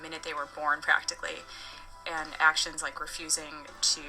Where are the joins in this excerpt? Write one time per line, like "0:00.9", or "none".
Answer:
0:01.4

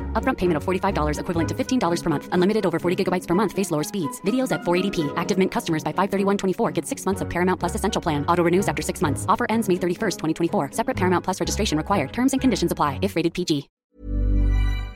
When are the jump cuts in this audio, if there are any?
0:13.8

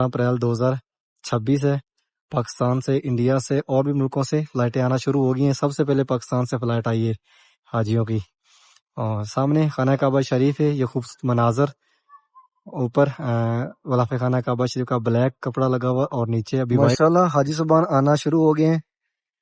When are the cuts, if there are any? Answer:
0:16.9

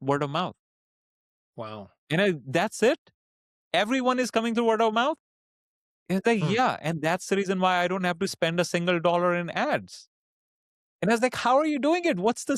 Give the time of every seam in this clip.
none

